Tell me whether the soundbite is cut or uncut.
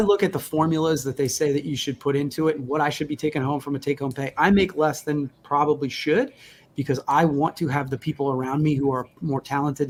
uncut